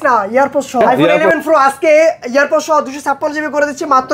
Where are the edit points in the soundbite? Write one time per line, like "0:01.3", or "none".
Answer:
0:01.2